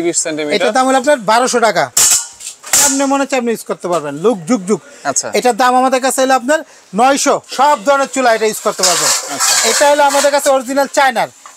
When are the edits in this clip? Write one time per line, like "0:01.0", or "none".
0:01.9
0:07.5